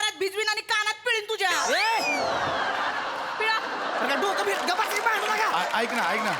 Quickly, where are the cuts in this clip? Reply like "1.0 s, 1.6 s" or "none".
none